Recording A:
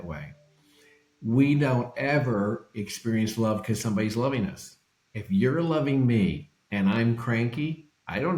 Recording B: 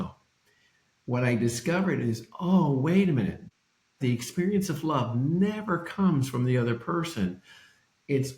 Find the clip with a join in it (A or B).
B